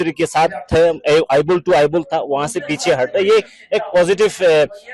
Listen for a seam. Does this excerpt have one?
no; 0 cuts

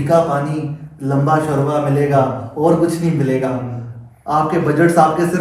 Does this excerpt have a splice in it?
no; 0 cuts

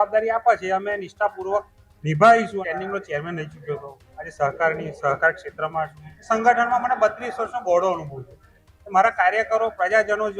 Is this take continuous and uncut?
no; 1 cut; at 2.6 s

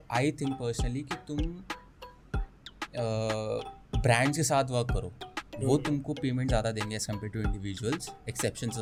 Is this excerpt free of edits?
yes; 0 cuts

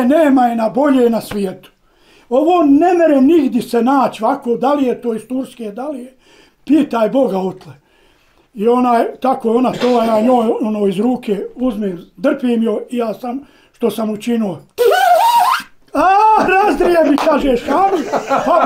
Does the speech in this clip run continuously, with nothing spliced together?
yes; 0 cuts

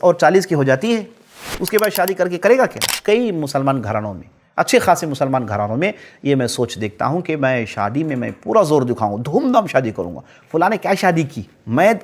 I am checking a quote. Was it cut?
yes; 1 cut; at 2.8 s

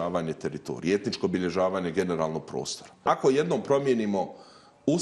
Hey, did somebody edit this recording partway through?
yes; 1 cut; at 3.0 s

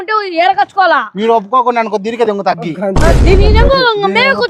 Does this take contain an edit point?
no; 0 cuts

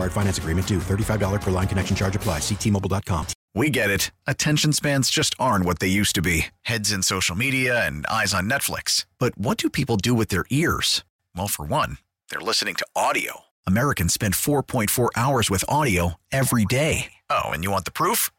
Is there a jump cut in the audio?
yes; 1 cut; at 3.4 s

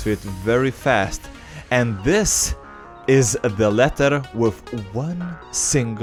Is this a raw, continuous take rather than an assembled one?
yes; 0 cuts

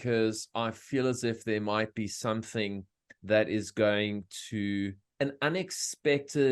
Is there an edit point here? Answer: yes; 1 cut; at 5.0 s

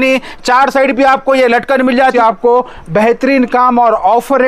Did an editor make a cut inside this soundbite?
yes; 1 cut; at 2.1 s

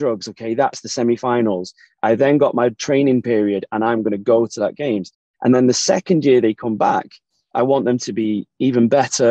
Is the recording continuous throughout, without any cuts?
yes; 0 cuts

